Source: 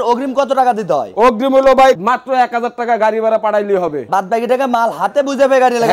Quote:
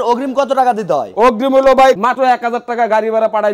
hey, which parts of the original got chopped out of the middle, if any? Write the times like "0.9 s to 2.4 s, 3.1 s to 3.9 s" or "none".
2.1 s to 2.2 s